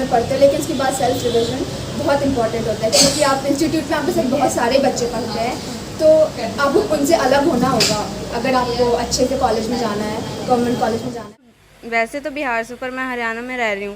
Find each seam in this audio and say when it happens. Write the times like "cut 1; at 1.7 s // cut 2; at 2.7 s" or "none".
cut 1; at 11.2 s